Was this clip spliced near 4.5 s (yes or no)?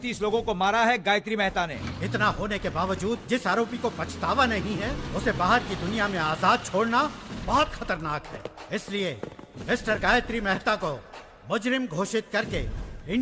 no